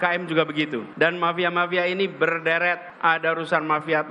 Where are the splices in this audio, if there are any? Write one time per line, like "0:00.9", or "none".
0:01.1
0:02.9